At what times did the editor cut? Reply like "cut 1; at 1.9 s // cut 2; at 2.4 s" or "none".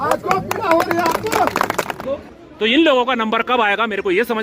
cut 1; at 1.9 s